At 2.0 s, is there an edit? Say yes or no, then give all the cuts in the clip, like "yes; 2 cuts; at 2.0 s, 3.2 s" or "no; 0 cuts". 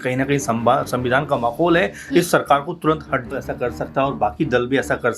no; 1 cut; at 3.3 s